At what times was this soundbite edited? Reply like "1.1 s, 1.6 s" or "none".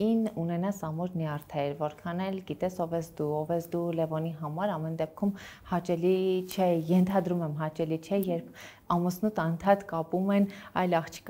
none